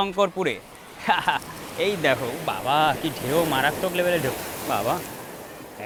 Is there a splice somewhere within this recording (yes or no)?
no